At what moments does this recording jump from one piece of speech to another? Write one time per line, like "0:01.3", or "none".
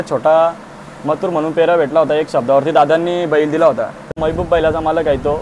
0:04.2